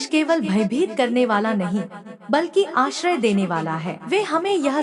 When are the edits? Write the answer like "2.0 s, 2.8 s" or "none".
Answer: 3.9 s